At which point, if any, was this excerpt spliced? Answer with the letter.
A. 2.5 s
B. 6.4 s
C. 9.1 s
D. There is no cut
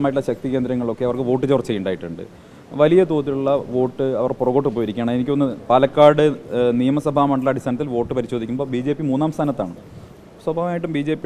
D